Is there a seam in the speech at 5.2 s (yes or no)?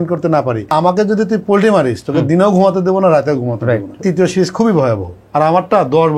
yes